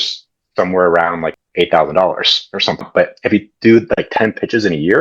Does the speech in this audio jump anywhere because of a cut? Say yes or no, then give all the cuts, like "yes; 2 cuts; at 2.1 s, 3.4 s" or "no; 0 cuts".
yes; 2 cuts; at 1.3 s, 2.8 s